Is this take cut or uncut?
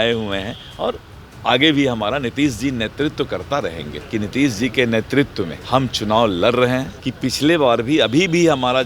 cut